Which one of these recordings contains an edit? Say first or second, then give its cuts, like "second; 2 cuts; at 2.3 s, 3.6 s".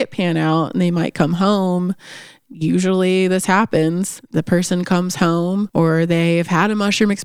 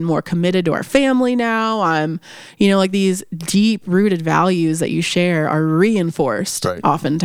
first; 2 cuts; at 4.2 s, 5.7 s